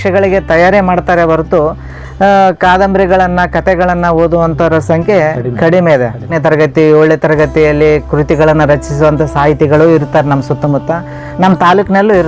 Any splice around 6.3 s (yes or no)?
yes